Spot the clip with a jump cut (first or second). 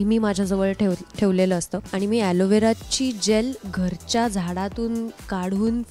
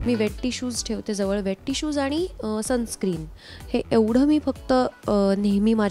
first